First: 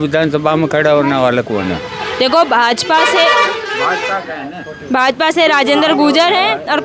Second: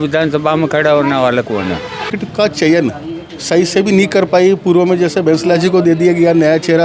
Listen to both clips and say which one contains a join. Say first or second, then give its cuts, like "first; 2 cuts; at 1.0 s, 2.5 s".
second; 1 cut; at 2.1 s